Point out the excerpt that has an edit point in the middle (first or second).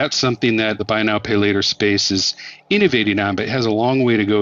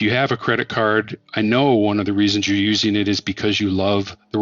second